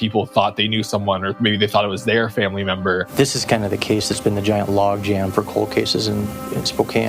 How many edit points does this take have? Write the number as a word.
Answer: one